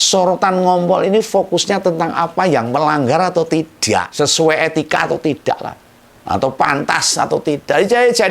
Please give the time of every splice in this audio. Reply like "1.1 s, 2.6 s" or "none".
4.1 s

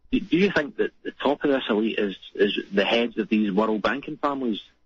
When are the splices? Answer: none

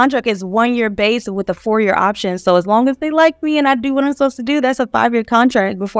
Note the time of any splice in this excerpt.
none

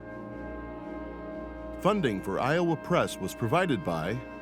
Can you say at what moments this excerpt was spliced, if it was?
1.8 s

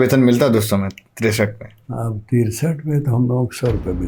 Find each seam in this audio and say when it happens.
none

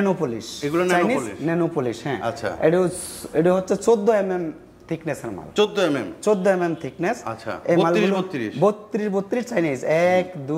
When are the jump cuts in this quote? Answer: none

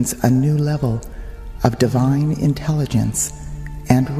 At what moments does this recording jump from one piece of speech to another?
2.2 s

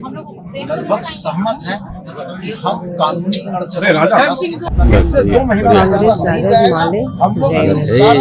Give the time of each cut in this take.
4.6 s

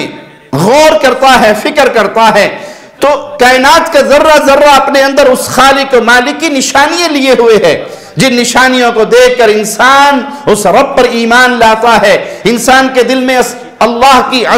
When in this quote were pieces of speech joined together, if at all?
none

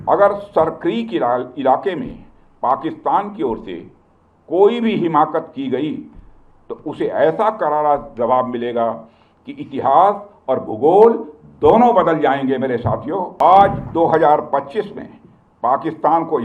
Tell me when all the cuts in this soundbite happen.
13.3 s

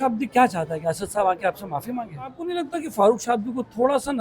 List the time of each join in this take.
2.5 s

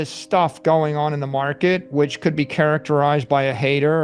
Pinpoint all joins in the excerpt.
none

